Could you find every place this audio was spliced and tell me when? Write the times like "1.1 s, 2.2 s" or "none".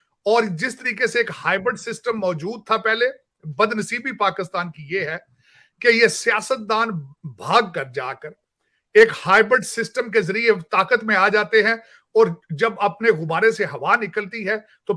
none

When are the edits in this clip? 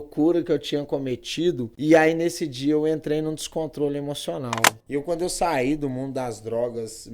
1.7 s, 4.7 s

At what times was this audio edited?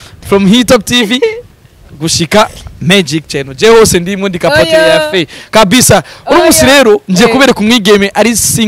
none

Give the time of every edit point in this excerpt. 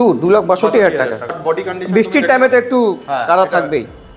1.6 s

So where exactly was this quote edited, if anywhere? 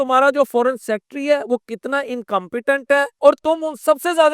3.1 s

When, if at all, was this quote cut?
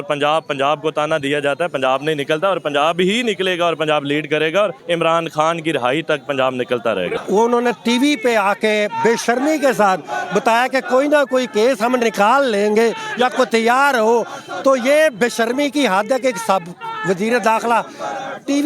4.8 s, 7.2 s

